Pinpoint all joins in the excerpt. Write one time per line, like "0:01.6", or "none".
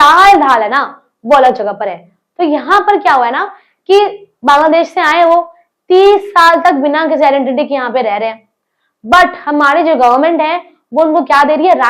none